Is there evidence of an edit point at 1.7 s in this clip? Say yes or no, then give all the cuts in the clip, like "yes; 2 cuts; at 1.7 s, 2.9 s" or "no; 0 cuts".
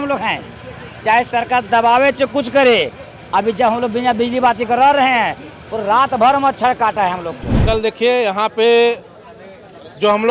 no; 1 cut; at 7.6 s